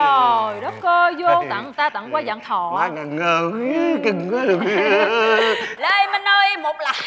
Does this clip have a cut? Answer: yes; 1 cut; at 5.7 s

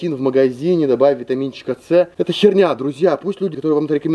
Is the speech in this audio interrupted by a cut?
no; 0 cuts

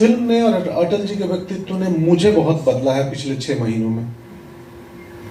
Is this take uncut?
yes; 0 cuts

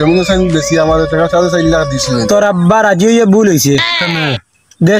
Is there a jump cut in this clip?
yes; 1 cut; at 2.3 s

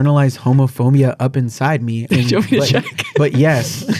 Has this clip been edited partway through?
yes; 1 cut; at 2.1 s

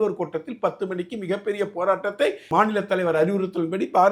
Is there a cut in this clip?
yes; 1 cut; at 2.5 s

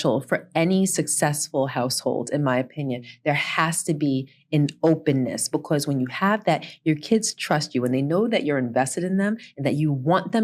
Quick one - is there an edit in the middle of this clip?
no; 0 cuts

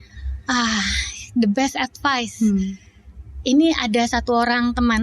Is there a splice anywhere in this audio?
no; 0 cuts

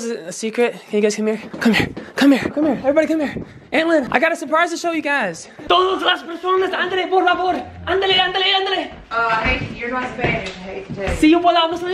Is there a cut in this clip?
yes; 3 cuts; at 1.5 s, 2.5 s, 4.1 s

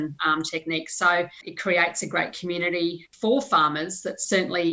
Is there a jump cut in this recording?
yes; 2 cuts; at 1.4 s, 3.1 s

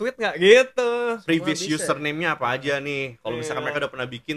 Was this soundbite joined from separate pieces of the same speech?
no; 0 cuts

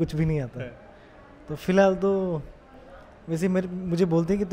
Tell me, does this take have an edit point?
no; 0 cuts

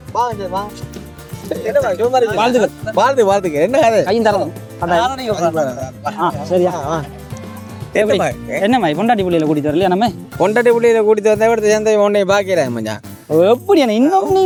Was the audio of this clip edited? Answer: no; 0 cuts

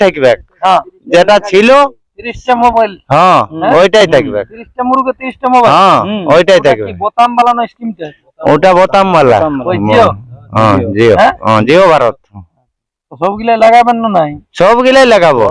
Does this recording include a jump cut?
no; 0 cuts

